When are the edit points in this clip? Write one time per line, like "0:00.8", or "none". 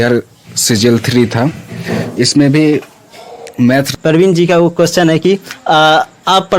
0:03.9